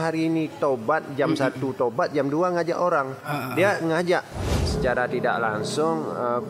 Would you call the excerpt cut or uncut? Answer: cut